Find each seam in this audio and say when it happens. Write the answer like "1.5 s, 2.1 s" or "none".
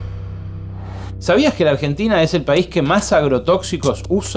1.0 s